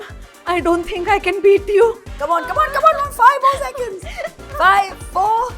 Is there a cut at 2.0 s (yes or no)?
no